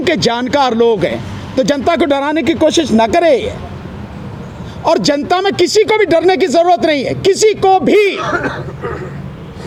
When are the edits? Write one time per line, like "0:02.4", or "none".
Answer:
none